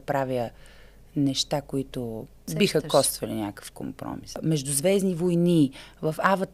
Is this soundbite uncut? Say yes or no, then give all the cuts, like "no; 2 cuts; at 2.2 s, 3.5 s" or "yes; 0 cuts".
no; 2 cuts; at 2.4 s, 4.4 s